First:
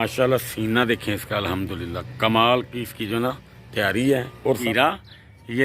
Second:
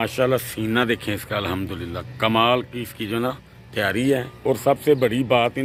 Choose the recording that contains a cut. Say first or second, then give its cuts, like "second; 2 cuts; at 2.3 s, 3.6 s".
first; 1 cut; at 4.6 s